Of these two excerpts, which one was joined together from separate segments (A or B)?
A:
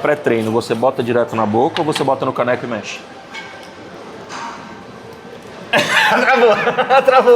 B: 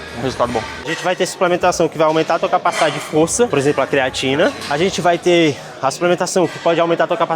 B